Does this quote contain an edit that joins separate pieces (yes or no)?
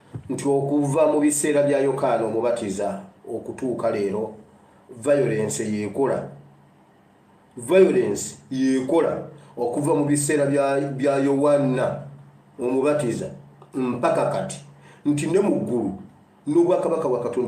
no